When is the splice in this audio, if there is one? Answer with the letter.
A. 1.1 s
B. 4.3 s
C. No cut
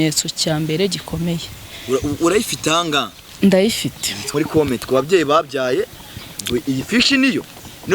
B